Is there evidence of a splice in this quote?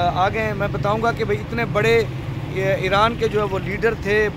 no; 0 cuts

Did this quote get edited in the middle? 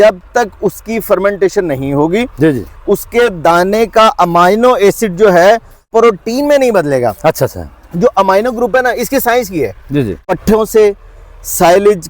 yes; 2 cuts; at 5.9 s, 10.3 s

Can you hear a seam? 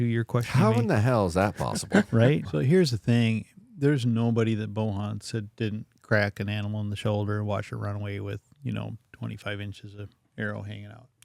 yes; 1 cut; at 2.4 s

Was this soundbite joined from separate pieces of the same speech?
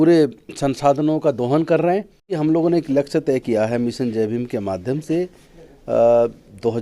yes; 1 cut; at 2.4 s

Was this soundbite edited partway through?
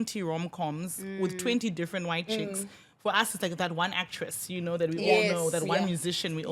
no; 0 cuts

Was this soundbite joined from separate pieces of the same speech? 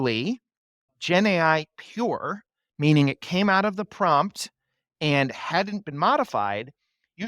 no; 0 cuts

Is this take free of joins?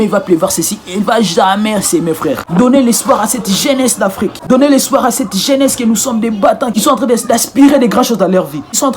no; 2 cuts; at 2.4 s, 6.7 s

